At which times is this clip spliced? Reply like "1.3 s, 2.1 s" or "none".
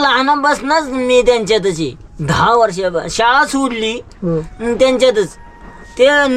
none